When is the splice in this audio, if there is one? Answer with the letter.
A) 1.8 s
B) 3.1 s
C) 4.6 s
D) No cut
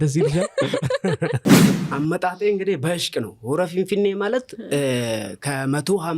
A